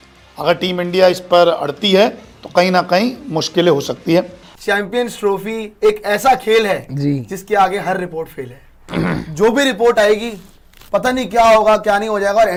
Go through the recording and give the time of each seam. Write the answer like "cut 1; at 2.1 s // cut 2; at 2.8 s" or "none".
none